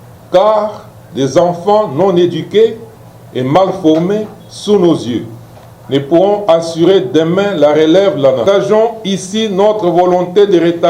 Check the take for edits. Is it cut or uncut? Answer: cut